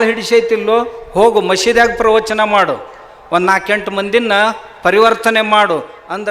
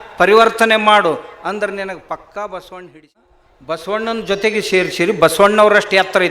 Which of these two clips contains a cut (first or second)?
second